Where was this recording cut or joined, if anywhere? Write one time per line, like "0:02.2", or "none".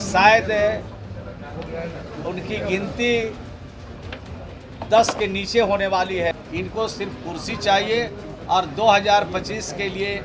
0:06.3